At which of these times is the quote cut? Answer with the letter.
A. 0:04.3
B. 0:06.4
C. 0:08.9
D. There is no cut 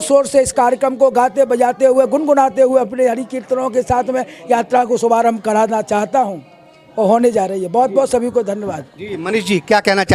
D